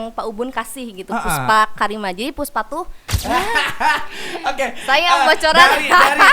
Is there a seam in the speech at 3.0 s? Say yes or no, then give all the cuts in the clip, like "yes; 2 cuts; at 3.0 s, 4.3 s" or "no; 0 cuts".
yes; 1 cut; at 3.0 s